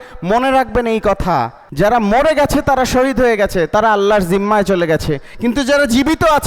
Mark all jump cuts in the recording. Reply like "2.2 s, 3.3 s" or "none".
1.6 s